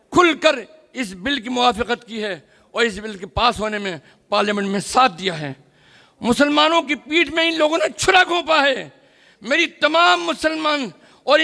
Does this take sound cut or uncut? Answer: uncut